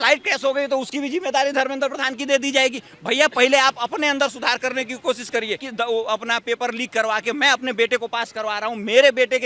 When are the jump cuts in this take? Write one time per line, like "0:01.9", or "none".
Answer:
0:05.7